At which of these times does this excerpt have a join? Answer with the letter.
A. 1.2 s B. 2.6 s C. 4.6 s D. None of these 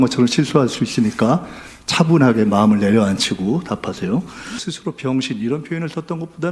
C